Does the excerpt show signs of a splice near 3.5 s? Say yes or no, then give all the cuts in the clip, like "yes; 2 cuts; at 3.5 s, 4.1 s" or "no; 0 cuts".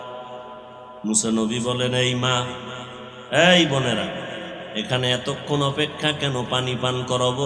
no; 0 cuts